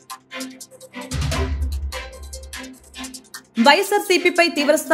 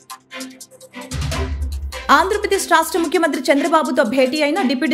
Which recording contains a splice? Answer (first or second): second